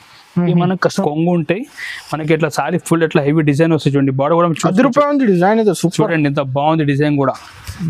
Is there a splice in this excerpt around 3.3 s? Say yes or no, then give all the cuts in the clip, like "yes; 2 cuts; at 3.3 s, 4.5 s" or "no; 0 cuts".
no; 1 cut; at 1.0 s